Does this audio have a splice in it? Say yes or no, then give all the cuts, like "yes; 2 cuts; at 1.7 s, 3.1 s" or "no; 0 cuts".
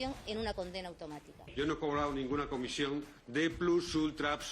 yes; 1 cut; at 1.5 s